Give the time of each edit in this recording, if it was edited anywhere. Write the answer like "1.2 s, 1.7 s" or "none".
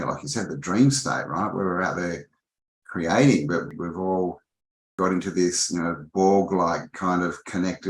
3.7 s, 4.9 s